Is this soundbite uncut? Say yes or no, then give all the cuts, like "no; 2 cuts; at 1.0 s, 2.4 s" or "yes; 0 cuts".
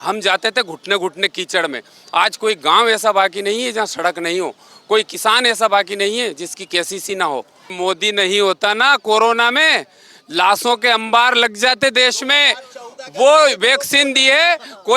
no; 1 cut; at 7.7 s